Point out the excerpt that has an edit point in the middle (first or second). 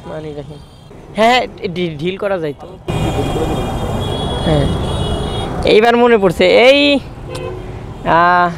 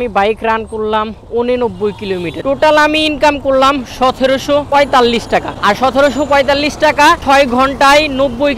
second